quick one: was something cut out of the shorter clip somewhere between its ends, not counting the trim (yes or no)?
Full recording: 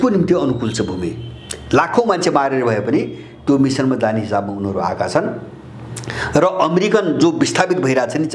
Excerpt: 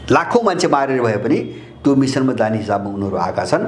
no